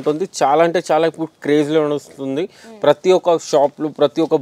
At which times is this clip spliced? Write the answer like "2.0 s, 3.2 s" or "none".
none